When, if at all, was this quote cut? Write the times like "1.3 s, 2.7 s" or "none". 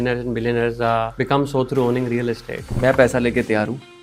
1.1 s, 2.7 s